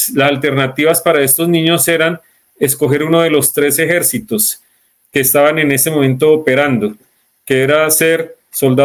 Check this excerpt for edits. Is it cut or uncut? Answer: uncut